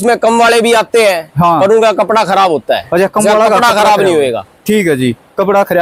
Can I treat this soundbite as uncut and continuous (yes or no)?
yes